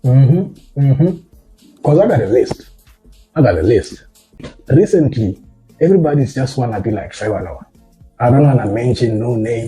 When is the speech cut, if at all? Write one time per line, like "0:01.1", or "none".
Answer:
0:04.5